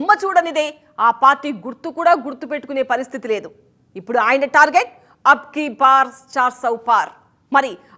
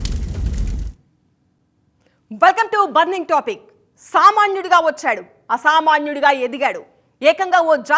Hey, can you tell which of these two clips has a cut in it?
second; 1 cut; at 1.7 s

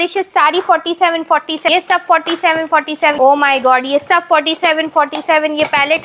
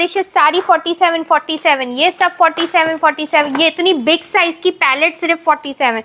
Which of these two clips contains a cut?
first; 2 cuts; at 1.7 s, 3.1 s

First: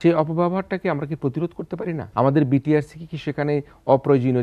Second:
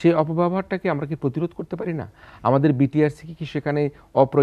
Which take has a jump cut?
first; 1 cut; at 2.0 s

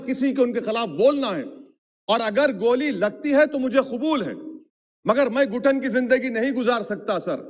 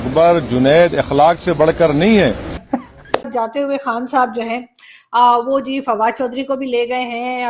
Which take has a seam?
second; 1 cut; at 3.3 s

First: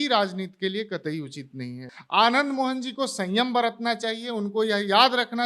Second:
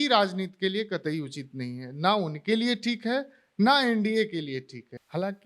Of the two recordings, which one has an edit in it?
first; 1 cut; at 1.9 s

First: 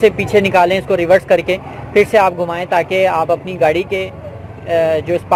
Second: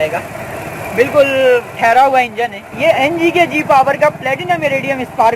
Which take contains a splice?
second; 1 cut; at 2.6 s

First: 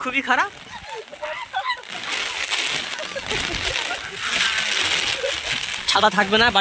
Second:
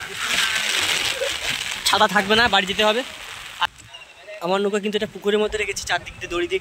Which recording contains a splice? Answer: second; 1 cut; at 3.7 s

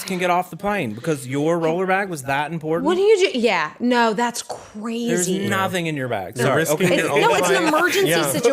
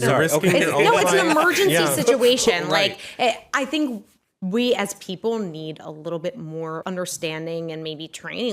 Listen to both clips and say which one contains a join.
second; 1 cut; at 6.8 s

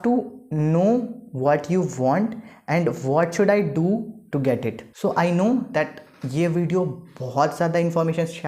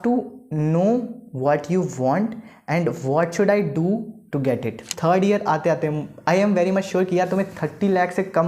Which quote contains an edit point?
second; 1 cut; at 4.9 s

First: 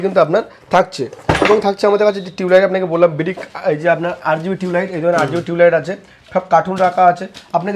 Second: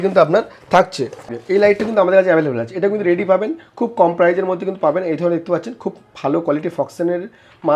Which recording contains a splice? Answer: second; 1 cut; at 1.3 s

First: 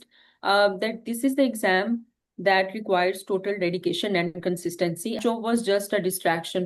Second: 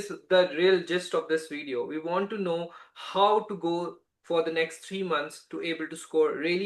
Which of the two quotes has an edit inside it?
first; 1 cut; at 5.2 s

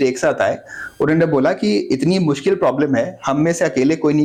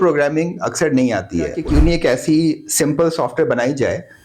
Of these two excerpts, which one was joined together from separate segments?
second; 1 cut; at 1.6 s

